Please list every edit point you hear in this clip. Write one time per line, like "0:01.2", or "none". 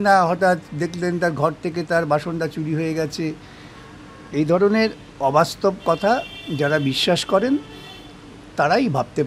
none